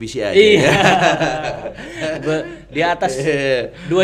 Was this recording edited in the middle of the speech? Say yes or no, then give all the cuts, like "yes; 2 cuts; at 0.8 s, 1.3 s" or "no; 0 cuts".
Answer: no; 0 cuts